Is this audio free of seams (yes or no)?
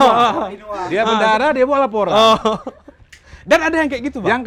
yes